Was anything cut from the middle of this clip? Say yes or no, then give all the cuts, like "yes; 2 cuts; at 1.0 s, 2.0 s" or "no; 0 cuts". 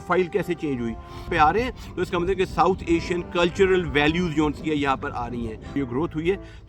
yes; 2 cuts; at 1.3 s, 5.7 s